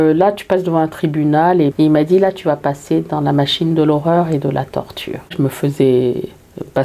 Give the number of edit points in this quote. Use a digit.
2